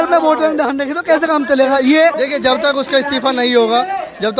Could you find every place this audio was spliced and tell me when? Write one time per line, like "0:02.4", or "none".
0:02.2